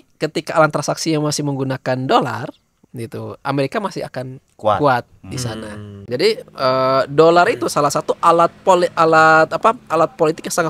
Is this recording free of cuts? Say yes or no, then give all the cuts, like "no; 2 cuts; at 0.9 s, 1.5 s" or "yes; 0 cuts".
no; 1 cut; at 6.0 s